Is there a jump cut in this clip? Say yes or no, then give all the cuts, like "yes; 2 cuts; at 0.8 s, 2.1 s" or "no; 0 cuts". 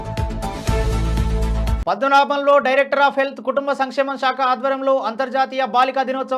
no; 0 cuts